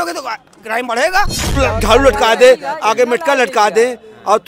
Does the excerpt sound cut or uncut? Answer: cut